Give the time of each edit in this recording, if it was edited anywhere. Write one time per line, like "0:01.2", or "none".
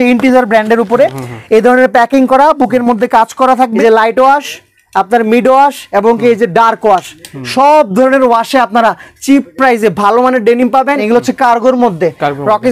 0:03.7
0:11.0